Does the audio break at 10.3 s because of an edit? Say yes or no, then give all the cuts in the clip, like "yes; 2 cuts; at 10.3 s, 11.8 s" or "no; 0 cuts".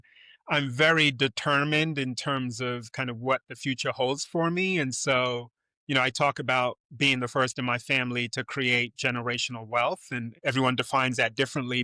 yes; 1 cut; at 10.3 s